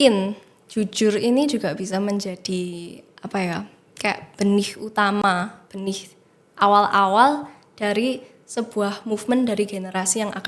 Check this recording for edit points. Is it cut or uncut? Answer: uncut